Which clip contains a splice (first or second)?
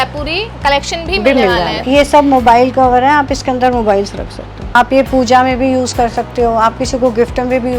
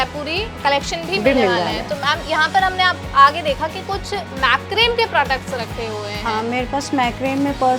first